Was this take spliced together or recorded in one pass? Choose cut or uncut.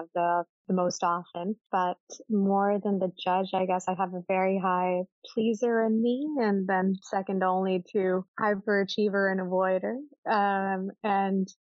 cut